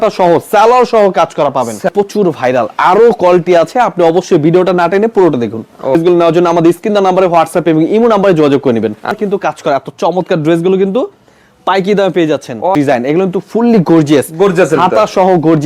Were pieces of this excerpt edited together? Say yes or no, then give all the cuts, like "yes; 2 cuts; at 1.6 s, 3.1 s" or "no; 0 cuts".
yes; 4 cuts; at 1.9 s, 5.9 s, 9.2 s, 12.7 s